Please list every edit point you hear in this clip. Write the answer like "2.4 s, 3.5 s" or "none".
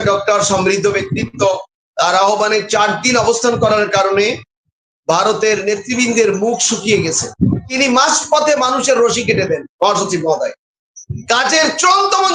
7.7 s